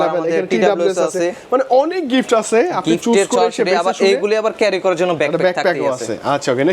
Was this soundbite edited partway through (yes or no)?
no